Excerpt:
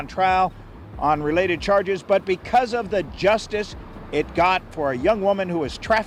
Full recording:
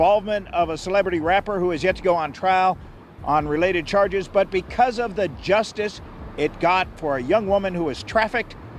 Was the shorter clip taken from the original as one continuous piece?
yes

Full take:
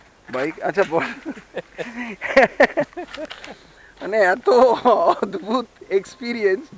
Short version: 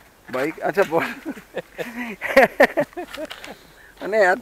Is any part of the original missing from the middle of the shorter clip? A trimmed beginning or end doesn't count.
no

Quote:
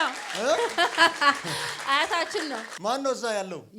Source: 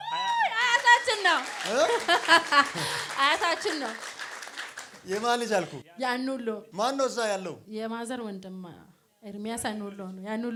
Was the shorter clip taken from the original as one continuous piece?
no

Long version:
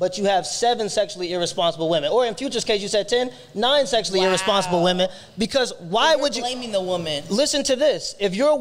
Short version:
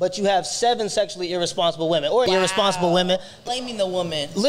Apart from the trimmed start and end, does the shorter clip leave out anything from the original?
yes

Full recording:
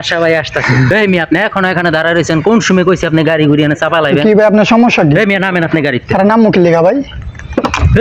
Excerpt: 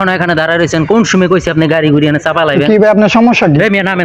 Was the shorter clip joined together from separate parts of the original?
no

